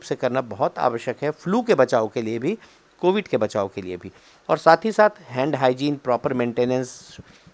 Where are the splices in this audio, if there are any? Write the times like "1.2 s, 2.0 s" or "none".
none